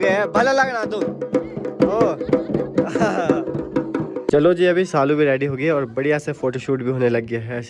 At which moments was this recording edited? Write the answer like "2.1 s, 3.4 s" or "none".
4.2 s